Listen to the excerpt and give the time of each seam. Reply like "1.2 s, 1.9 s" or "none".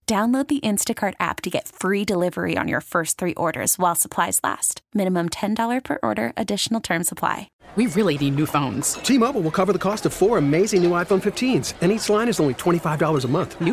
7.6 s